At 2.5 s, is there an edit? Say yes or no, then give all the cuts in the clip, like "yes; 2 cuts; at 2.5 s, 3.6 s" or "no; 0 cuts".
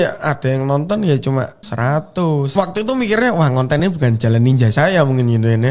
yes; 2 cuts; at 1.6 s, 2.5 s